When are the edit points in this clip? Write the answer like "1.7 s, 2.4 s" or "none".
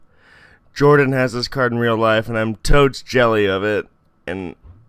3.0 s